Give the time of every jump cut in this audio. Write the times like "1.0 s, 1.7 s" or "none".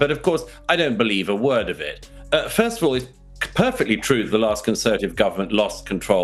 none